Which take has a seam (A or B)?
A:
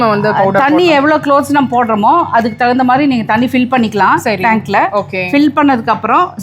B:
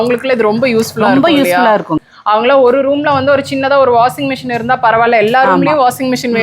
B